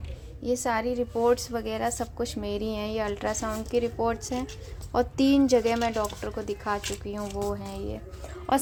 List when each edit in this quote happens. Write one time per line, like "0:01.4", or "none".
none